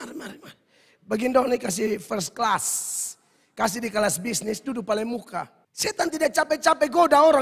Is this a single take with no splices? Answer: no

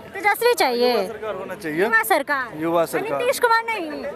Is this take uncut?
yes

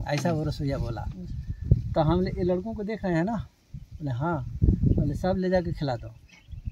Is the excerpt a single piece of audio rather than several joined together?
yes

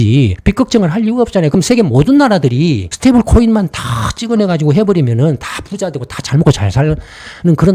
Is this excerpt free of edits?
yes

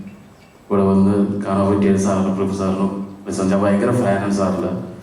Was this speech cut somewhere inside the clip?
no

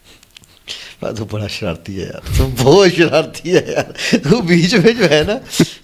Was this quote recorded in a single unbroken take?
yes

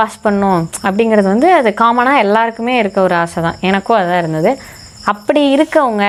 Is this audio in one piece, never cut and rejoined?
yes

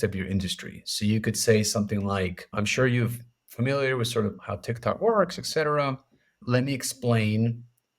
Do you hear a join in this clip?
yes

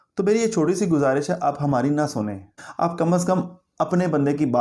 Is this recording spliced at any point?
yes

